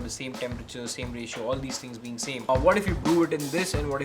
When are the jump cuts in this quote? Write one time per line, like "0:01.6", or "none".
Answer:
0:02.5